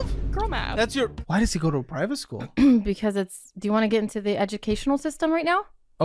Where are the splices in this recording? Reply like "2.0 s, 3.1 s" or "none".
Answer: 1.2 s